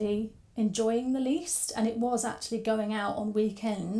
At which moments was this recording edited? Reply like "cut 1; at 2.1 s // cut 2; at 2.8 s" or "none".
none